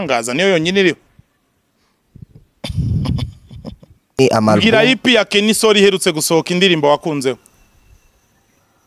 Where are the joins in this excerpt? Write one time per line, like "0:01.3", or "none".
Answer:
0:04.2